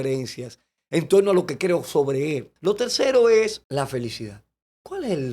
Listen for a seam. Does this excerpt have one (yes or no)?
yes